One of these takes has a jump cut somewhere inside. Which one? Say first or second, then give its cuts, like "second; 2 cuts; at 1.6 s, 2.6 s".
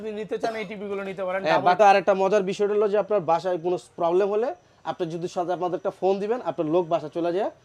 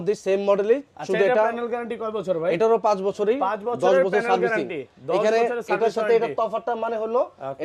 first; 1 cut; at 1.8 s